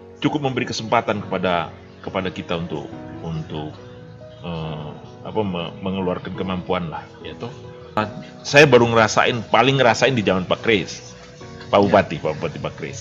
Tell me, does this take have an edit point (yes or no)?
yes